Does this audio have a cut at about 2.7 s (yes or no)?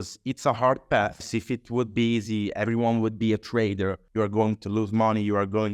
no